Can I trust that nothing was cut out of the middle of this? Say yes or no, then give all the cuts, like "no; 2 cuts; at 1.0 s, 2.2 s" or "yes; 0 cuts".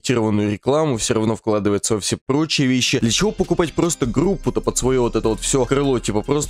yes; 0 cuts